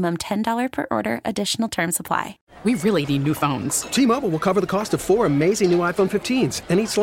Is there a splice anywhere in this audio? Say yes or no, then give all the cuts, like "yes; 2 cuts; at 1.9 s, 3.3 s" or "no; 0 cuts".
yes; 1 cut; at 2.4 s